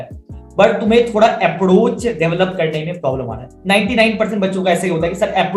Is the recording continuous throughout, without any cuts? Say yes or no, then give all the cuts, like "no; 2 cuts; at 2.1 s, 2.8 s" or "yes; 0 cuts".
yes; 0 cuts